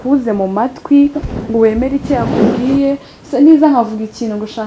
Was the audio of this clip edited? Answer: yes; 1 cut; at 3.1 s

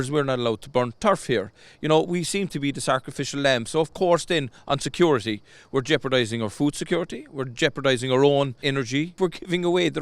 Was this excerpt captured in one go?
no; 1 cut; at 8.8 s

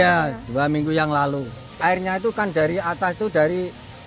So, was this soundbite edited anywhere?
yes; 1 cut; at 1.7 s

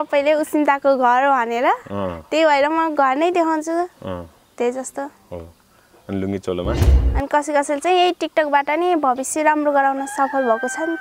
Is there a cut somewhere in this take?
yes; 1 cut; at 6.9 s

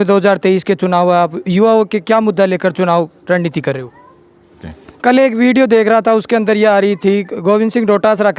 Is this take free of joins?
no; 1 cut; at 4.5 s

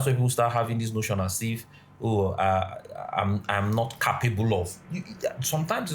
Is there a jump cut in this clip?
no; 0 cuts

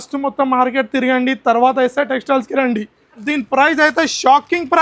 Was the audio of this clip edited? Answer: yes; 1 cut; at 3.2 s

